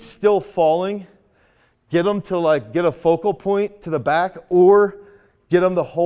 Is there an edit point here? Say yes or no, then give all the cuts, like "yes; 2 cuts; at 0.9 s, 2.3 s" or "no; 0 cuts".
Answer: no; 0 cuts